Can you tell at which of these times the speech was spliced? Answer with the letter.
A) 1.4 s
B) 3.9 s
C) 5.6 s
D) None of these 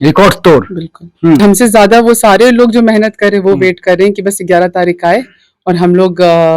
A